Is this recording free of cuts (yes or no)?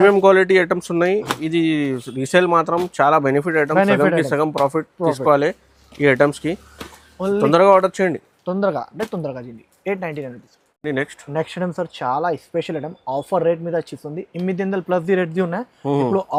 yes